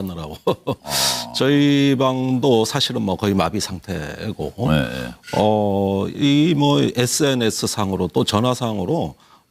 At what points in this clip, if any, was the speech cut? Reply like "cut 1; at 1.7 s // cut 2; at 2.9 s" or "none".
cut 1; at 2.8 s